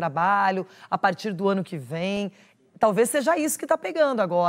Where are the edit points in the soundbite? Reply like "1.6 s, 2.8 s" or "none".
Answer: none